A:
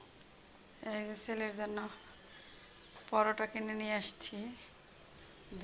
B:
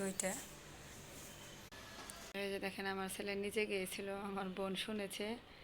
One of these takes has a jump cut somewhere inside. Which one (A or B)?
B